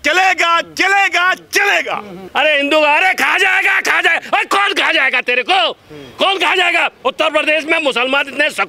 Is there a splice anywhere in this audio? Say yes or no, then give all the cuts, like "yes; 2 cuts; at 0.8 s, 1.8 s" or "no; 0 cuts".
yes; 1 cut; at 2.3 s